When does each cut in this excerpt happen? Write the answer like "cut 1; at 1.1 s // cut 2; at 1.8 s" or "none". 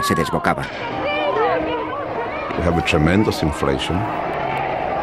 none